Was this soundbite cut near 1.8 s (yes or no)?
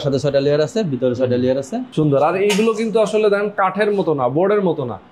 yes